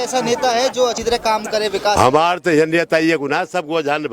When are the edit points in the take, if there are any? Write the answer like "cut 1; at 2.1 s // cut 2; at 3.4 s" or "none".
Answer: cut 1; at 1.0 s